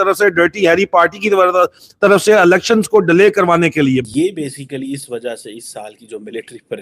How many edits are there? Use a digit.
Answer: 1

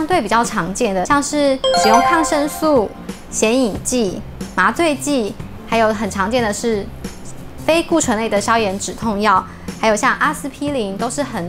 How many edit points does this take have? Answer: 1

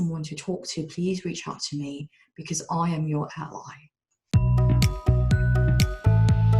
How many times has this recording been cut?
1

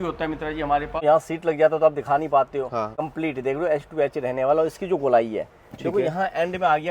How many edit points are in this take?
2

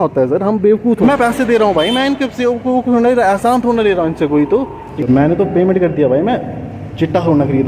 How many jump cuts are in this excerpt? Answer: 2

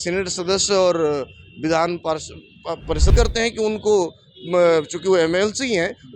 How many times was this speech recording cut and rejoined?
1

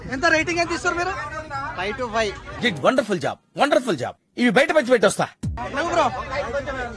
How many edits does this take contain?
0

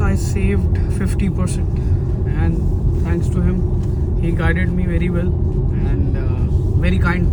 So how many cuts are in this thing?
0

